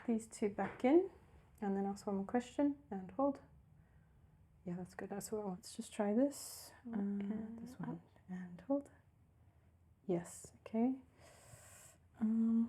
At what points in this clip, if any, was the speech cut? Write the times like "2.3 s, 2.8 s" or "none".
5.6 s